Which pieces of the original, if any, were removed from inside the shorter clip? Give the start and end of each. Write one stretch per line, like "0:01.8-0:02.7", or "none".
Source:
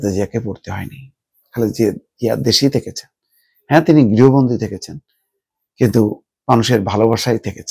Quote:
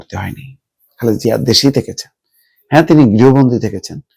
0:01.7-0:02.2